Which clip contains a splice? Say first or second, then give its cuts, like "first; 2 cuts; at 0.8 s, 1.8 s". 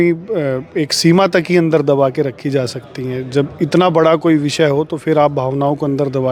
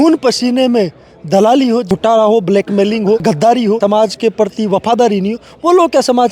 second; 2 cuts; at 1.9 s, 3.8 s